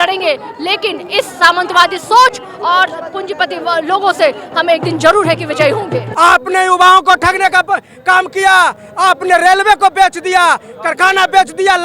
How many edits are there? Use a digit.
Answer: 1